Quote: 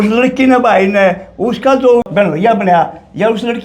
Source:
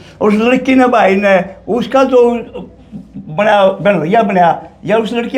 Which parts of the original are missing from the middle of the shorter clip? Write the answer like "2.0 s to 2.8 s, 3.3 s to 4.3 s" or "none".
2.4 s to 3.8 s